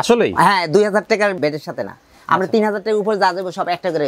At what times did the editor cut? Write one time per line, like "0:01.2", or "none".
0:01.4